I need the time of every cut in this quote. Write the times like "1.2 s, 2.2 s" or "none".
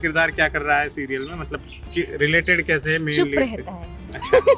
none

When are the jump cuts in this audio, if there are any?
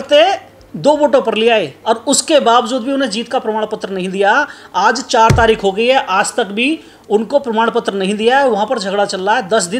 1.7 s

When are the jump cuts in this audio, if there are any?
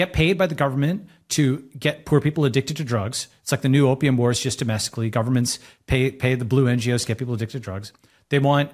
none

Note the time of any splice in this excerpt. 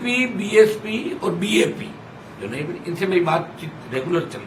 none

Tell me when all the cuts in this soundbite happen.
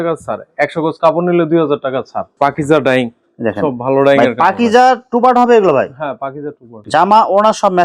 2.2 s, 6.7 s

